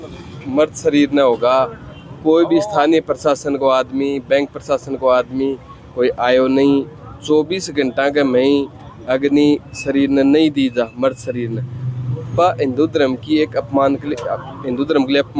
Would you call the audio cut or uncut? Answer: uncut